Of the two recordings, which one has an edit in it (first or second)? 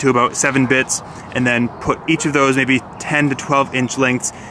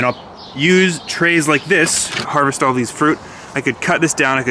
second